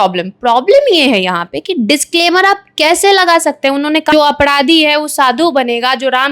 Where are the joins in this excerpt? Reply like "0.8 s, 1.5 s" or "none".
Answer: 4.2 s